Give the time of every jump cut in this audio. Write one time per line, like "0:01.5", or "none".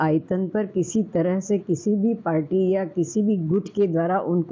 none